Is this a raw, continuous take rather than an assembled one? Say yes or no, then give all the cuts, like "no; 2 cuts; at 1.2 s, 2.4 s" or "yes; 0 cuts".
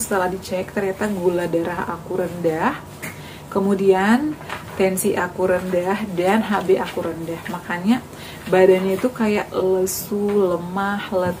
yes; 0 cuts